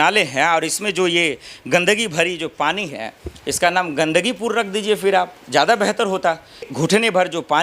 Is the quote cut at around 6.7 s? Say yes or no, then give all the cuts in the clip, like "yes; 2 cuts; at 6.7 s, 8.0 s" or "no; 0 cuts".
yes; 1 cut; at 6.7 s